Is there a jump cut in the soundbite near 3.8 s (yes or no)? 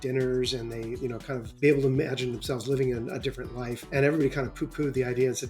yes